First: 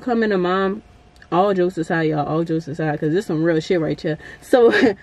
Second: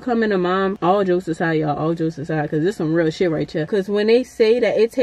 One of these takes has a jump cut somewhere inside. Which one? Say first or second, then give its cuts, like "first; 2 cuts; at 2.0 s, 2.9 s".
second; 2 cuts; at 0.8 s, 3.7 s